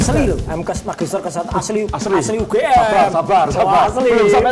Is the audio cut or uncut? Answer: uncut